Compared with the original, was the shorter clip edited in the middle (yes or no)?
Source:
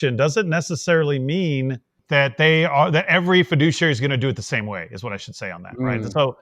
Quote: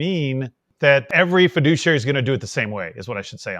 yes